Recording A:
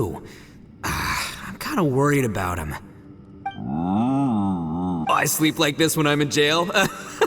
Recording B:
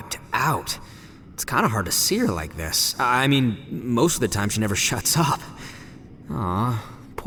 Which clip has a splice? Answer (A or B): A